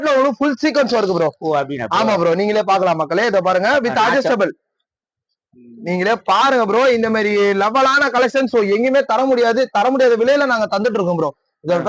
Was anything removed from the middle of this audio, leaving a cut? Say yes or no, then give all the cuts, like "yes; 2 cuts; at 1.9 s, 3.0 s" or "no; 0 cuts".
no; 0 cuts